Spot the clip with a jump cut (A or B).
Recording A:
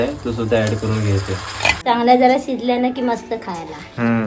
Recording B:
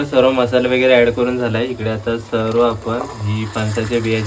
A